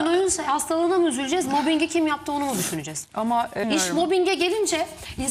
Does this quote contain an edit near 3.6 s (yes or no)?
yes